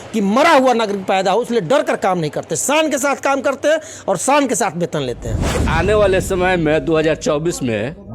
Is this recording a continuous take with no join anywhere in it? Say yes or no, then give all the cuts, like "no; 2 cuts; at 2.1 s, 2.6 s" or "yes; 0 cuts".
no; 1 cut; at 5.6 s